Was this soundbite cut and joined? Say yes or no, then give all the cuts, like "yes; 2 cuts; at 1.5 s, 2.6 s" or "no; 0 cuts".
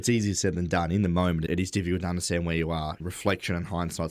yes; 2 cuts; at 1.5 s, 3.0 s